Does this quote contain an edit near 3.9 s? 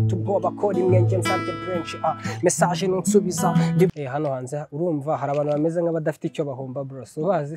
yes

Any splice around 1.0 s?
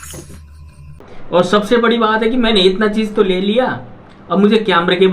yes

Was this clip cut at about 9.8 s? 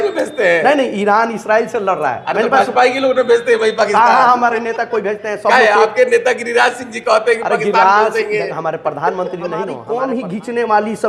yes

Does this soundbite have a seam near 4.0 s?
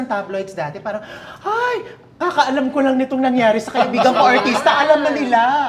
no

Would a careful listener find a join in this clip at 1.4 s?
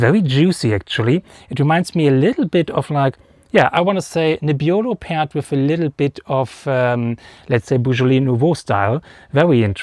no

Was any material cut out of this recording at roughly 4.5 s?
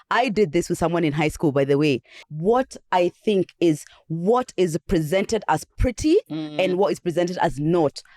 no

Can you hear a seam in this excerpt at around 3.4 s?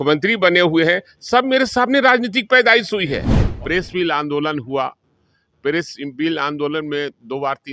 yes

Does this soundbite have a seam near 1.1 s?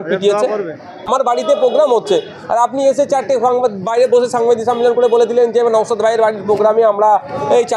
yes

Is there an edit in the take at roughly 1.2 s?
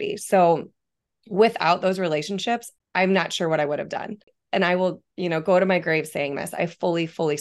no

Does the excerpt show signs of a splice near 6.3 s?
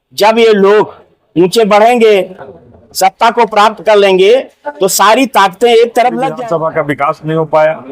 yes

